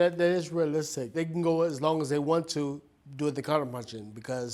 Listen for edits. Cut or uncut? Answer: uncut